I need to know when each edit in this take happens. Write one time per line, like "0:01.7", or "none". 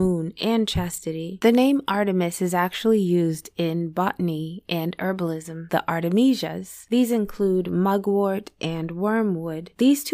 0:01.3
0:05.6